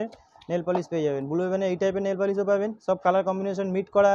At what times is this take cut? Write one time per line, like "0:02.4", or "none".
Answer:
none